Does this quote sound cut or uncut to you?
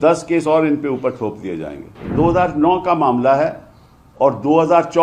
cut